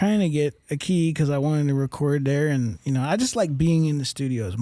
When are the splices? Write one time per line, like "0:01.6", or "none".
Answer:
none

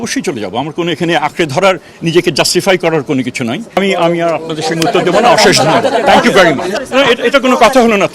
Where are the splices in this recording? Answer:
0:03.8
0:06.8

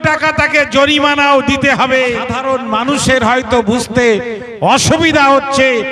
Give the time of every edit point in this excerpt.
0:02.4

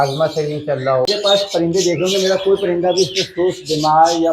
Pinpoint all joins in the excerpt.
0:01.1

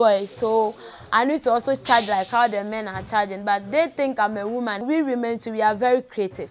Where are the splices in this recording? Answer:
0:04.8

